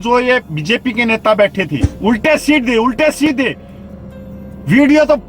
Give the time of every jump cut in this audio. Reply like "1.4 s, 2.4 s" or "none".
1.9 s